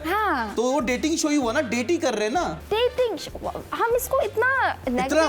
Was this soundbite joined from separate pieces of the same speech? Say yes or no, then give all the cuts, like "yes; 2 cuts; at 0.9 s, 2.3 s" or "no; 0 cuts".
yes; 1 cut; at 2.6 s